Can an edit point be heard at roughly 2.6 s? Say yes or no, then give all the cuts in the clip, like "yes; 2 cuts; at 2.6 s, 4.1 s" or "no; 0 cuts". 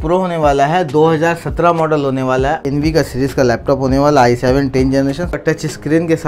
yes; 2 cuts; at 2.6 s, 5.4 s